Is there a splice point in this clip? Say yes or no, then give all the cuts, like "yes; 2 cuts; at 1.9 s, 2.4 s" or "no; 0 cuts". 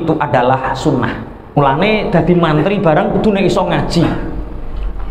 yes; 1 cut; at 1.6 s